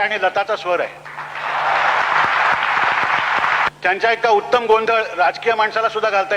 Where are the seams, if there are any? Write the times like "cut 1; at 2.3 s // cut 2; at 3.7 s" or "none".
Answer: cut 1; at 2.0 s // cut 2; at 3.7 s